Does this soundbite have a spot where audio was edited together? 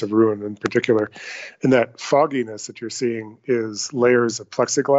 no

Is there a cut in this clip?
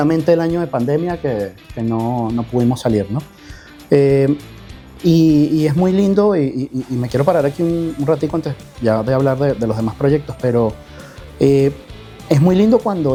no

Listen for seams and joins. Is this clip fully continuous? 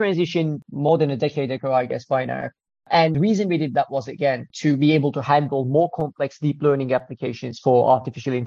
no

